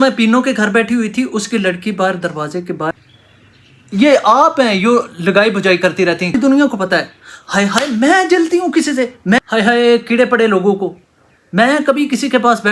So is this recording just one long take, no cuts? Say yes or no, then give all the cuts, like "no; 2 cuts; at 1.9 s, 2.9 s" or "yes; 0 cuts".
no; 3 cuts; at 2.9 s, 6.3 s, 9.4 s